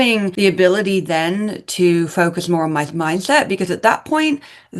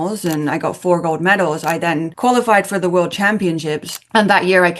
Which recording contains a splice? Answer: second; 1 cut; at 2.1 s

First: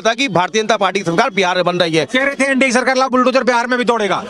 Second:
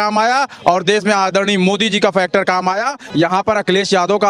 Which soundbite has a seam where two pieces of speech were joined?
second; 1 cut; at 3.0 s

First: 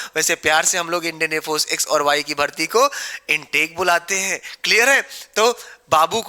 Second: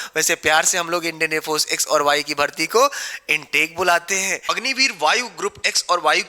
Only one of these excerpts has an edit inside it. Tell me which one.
second; 1 cut; at 4.5 s

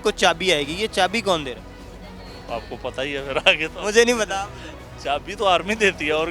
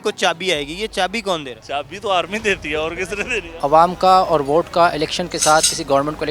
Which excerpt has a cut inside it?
second; 2 cuts; at 1.6 s, 3.6 s

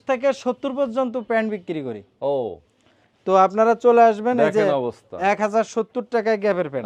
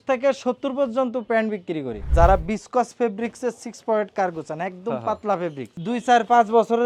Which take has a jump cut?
second; 2 cuts; at 2.0 s, 5.7 s

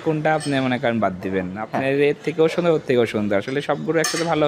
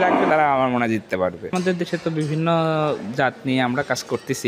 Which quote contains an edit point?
second; 1 cut; at 1.5 s

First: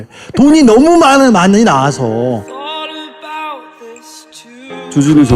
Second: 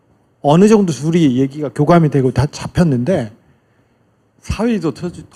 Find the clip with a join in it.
first; 1 cut; at 2.4 s

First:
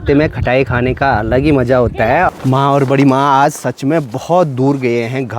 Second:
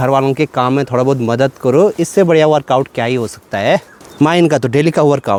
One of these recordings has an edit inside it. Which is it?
first; 1 cut; at 2.3 s

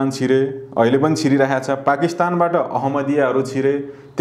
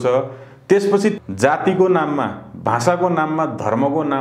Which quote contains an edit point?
second; 1 cut; at 1.2 s

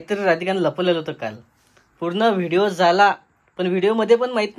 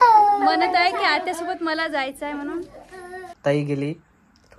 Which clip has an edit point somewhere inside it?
second; 1 cut; at 2.7 s

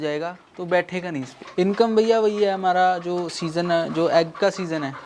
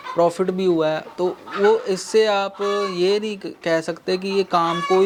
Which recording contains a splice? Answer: first; 1 cut; at 1.4 s

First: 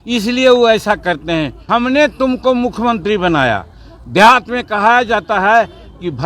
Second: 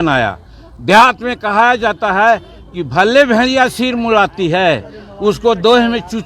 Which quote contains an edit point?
first; 1 cut; at 1.6 s

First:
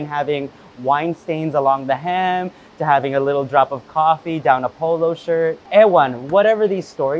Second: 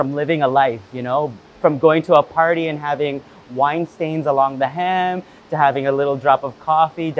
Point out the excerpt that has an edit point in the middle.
first; 1 cut; at 5.6 s

